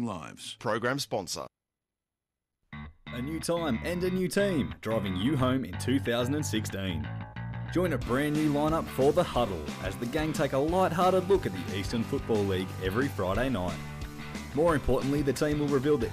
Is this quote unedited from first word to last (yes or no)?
no